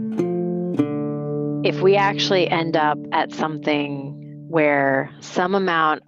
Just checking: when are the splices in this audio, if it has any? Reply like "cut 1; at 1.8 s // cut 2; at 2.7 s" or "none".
cut 1; at 1.6 s